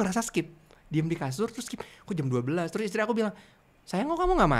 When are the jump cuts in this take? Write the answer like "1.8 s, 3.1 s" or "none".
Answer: none

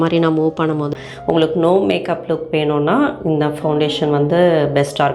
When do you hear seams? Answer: 0.9 s

